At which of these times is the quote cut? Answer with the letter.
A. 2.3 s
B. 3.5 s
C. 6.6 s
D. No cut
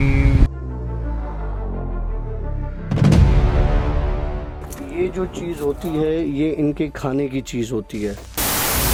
D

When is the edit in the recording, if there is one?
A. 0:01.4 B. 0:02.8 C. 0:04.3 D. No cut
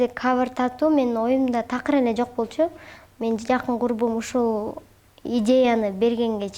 D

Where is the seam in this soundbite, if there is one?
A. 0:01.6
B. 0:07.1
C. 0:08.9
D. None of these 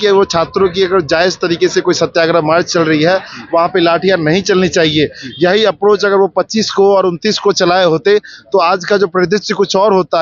D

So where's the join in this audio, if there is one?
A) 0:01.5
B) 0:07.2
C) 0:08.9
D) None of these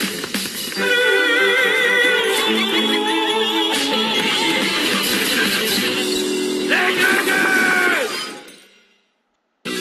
B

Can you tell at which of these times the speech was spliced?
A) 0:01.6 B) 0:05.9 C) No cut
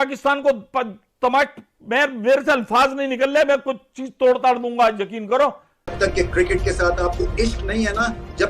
B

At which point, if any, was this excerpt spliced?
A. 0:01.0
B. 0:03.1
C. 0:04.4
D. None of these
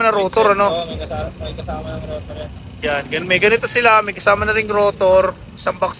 D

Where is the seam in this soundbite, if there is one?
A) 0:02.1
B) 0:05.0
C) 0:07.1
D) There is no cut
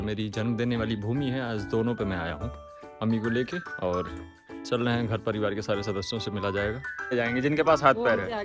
C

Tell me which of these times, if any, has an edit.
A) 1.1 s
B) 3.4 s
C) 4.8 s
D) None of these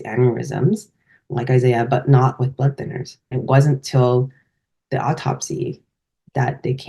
B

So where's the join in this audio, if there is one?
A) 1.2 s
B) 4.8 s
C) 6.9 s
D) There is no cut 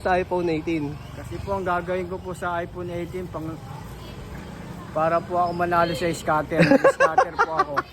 D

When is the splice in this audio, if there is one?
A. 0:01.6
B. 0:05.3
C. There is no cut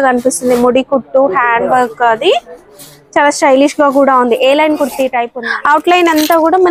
B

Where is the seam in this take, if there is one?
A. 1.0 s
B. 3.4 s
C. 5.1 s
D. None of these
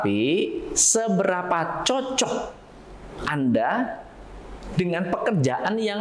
D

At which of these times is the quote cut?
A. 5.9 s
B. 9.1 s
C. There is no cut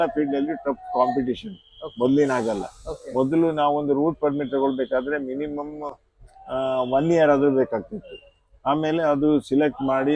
C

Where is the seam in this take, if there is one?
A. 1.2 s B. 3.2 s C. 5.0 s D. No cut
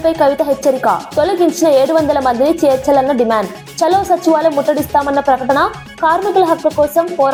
D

